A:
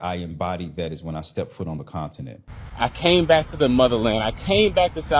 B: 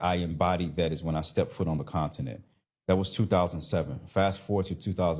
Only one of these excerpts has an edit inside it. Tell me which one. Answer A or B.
A